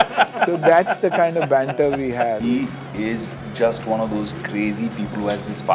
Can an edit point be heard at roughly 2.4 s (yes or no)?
yes